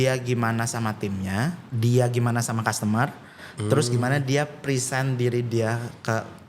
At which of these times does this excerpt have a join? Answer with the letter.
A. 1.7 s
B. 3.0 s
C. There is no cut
A